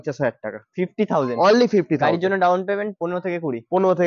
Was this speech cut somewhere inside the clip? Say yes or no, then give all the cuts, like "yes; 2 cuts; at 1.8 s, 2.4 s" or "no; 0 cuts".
no; 0 cuts